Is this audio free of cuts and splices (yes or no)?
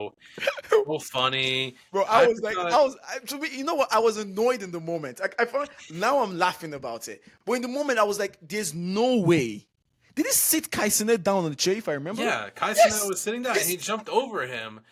yes